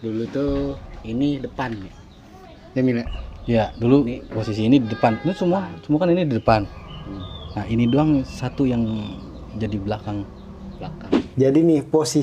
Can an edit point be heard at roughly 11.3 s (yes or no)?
yes